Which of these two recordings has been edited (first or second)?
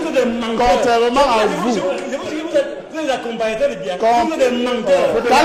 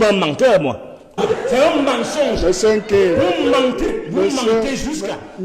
second